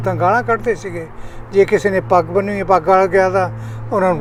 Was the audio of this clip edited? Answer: no; 0 cuts

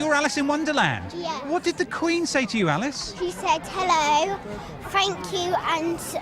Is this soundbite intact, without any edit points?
no; 1 cut; at 1.1 s

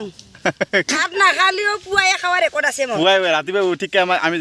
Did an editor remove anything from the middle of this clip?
yes; 1 cut; at 1.0 s

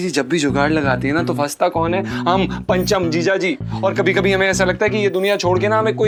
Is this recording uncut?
yes; 0 cuts

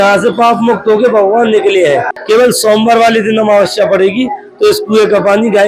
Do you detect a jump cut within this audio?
yes; 1 cut; at 2.1 s

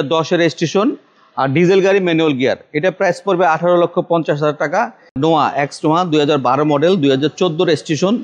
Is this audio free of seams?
no; 1 cut; at 5.0 s

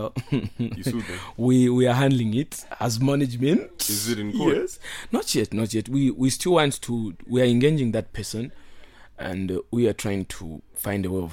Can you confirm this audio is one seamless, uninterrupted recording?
yes; 0 cuts

